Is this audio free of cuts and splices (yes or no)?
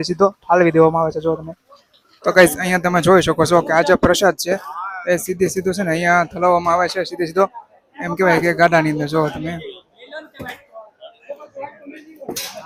yes